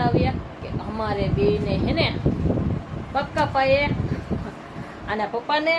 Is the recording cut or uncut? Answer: uncut